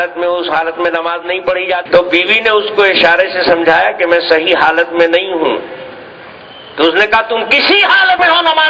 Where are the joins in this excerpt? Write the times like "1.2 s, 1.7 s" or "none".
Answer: 1.8 s